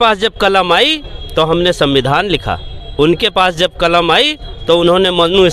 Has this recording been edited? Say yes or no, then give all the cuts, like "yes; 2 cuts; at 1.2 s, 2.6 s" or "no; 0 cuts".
no; 0 cuts